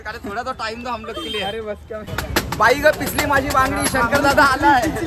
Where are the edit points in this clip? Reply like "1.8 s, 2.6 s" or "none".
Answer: 2.1 s